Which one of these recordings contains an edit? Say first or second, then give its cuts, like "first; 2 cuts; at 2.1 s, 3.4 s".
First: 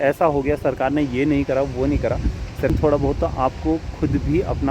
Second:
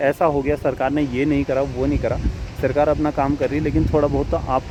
first; 1 cut; at 2.7 s